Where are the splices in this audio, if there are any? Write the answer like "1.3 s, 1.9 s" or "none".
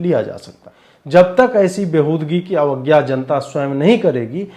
1.2 s